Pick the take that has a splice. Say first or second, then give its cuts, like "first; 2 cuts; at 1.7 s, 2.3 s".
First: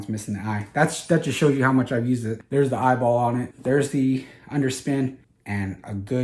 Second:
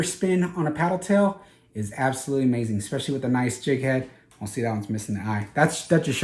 first; 3 cuts; at 2.4 s, 3.5 s, 5.3 s